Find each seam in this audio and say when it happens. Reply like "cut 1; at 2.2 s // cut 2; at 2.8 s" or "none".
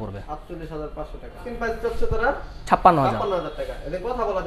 cut 1; at 1.5 s